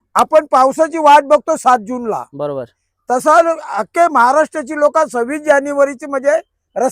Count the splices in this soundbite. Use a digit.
0